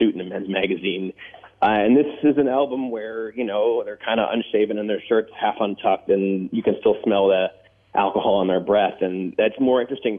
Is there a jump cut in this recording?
no; 0 cuts

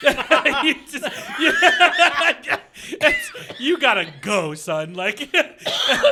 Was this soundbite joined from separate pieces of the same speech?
no; 0 cuts

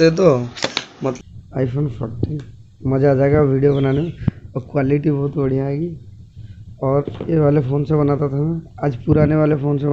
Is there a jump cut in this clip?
yes; 1 cut; at 1.1 s

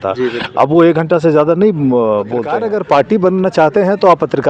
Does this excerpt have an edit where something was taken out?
yes; 1 cut; at 2.5 s

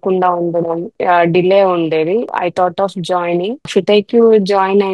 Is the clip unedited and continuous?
no; 3 cuts; at 0.9 s, 2.3 s, 3.6 s

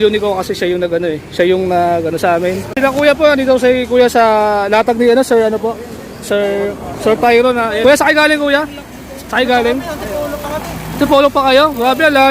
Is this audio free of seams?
no; 2 cuts; at 2.7 s, 7.8 s

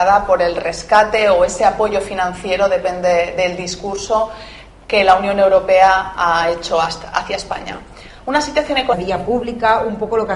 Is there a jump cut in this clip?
no; 0 cuts

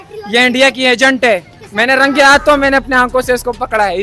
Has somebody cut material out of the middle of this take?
yes; 1 cut; at 1.6 s

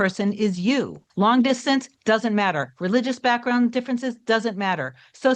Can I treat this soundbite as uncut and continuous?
no; 1 cut; at 1.0 s

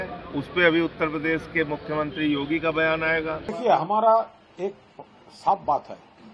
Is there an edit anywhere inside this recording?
yes; 1 cut; at 3.4 s

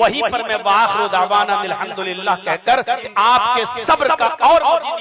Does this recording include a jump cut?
yes; 1 cut; at 3.0 s

